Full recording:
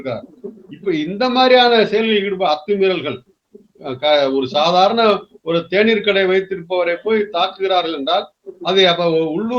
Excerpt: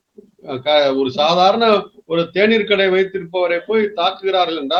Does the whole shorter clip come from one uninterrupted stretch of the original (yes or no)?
yes